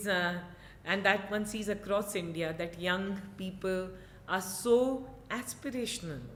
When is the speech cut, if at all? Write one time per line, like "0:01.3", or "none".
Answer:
none